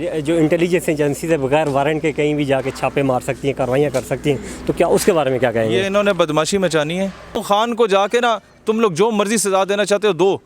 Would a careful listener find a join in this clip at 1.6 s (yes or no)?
no